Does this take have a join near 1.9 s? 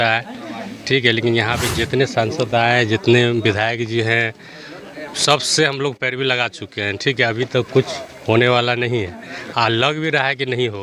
no; 0 cuts

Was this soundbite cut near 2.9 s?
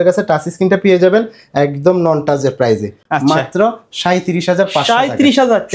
no; 0 cuts

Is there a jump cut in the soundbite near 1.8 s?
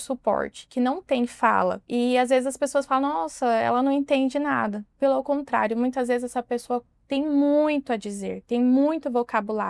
yes; 1 cut; at 1.8 s

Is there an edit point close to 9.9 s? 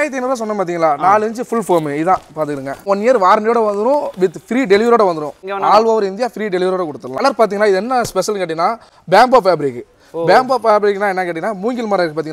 no; 3 cuts; at 2.8 s, 5.4 s, 7.2 s

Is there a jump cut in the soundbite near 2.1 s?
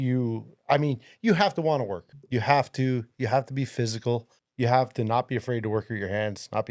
yes; 2 cuts; at 2.1 s, 4.4 s

